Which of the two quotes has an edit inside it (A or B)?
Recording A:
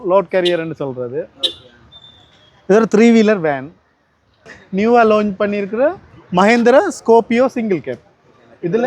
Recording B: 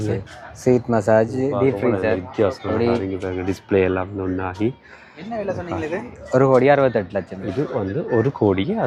A